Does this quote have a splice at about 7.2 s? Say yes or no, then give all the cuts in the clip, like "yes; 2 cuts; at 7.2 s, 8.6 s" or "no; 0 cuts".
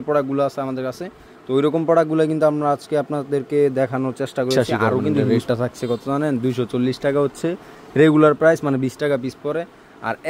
no; 1 cut; at 5.1 s